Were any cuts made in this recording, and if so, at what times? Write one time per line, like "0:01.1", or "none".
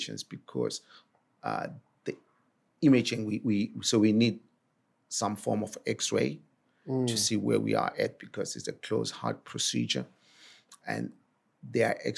none

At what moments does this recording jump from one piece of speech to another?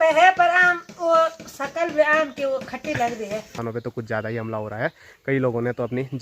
0:03.6

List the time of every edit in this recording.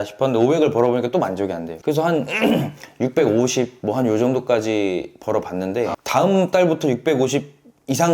0:06.0

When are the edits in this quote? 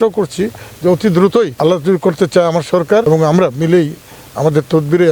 0:01.5
0:03.0

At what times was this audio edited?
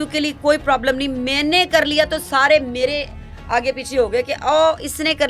none

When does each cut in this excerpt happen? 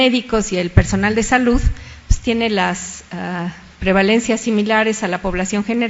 0:03.0

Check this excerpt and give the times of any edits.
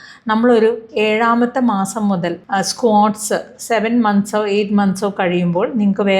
0:02.4

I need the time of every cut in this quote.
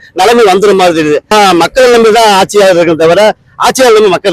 0:01.3

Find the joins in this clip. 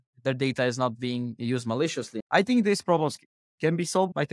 0:02.2

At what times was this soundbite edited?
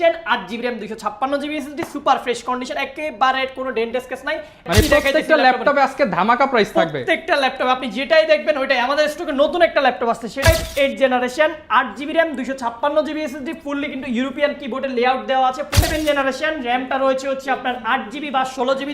0:04.6
0:10.5
0:15.7

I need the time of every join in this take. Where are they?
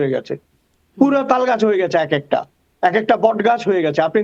none

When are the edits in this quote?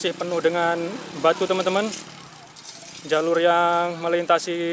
none

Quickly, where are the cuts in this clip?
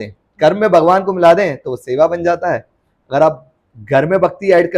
none

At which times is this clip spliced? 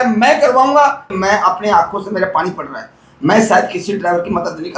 0:01.1

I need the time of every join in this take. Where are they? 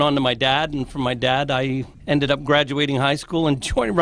0:01.9

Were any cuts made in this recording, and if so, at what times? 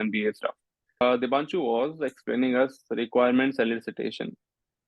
0:01.0

